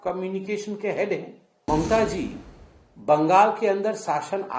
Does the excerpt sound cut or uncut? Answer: cut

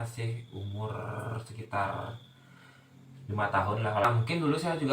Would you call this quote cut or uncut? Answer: cut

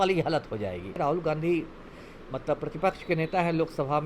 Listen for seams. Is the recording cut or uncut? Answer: cut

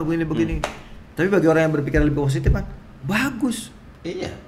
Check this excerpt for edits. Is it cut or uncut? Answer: uncut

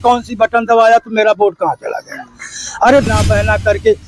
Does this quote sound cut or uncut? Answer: cut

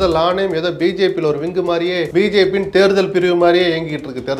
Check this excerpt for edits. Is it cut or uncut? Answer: cut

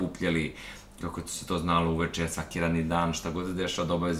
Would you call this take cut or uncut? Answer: uncut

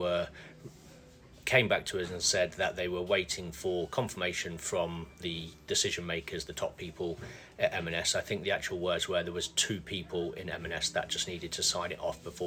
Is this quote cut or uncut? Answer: uncut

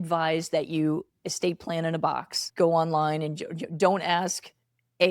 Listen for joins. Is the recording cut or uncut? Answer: cut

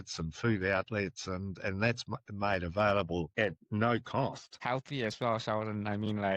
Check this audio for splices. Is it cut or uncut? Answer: cut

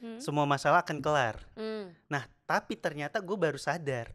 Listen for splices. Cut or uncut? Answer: uncut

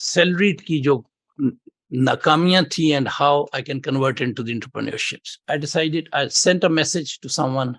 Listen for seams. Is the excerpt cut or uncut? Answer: cut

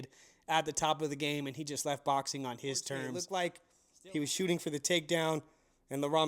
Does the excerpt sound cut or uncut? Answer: cut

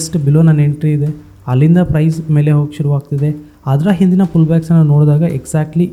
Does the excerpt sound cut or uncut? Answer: uncut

